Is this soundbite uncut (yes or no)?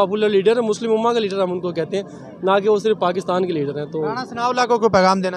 yes